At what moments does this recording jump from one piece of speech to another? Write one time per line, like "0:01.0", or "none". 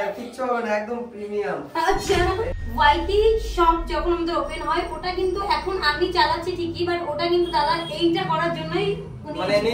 0:02.5